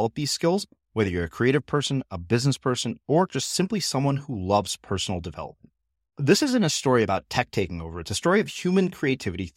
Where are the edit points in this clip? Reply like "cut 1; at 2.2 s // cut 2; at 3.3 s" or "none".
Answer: none